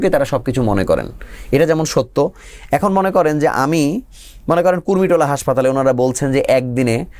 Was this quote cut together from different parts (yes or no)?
no